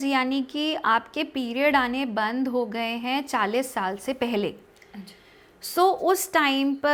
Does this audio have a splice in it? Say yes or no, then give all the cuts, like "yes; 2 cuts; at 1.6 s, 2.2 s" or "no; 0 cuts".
no; 0 cuts